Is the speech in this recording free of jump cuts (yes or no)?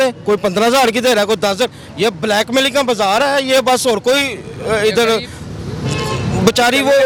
yes